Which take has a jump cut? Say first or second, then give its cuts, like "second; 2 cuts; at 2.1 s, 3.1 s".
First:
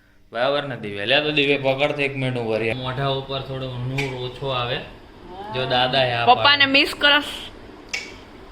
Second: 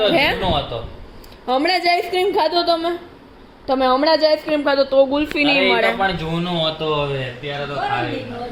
first; 1 cut; at 2.7 s